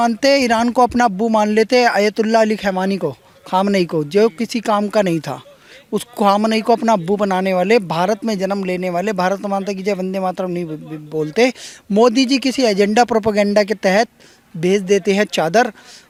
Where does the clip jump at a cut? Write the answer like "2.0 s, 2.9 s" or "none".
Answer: none